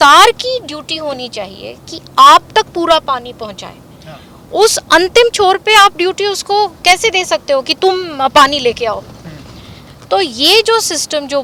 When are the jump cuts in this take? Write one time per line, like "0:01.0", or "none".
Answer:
none